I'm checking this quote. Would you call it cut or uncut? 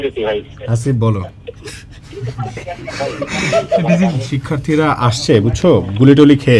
cut